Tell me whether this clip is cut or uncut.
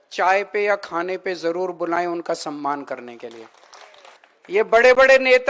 uncut